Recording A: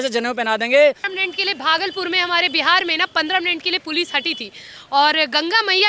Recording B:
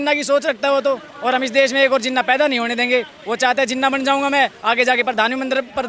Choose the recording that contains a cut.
A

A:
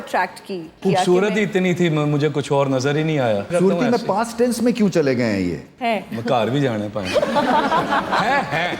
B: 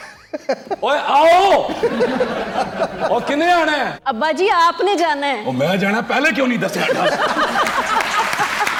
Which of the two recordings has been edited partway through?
A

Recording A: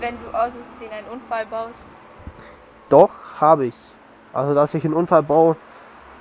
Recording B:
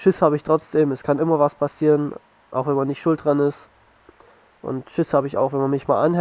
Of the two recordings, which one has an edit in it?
A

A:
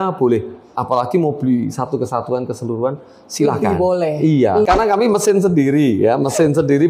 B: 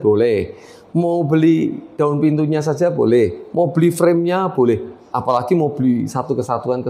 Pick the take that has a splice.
A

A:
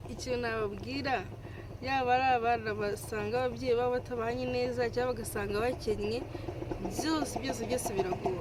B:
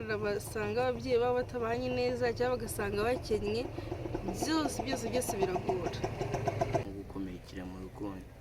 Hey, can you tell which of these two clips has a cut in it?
B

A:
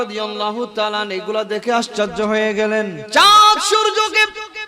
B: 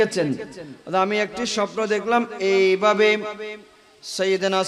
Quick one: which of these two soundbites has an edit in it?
A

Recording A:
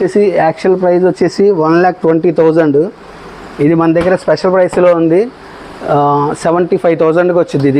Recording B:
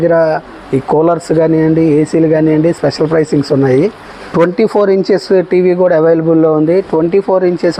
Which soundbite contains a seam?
B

